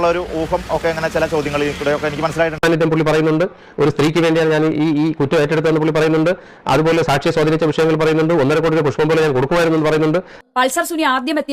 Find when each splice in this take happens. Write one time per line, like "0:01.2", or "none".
0:02.6
0:10.3